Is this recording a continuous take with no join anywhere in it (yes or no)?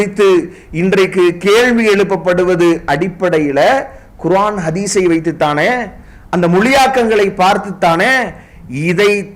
yes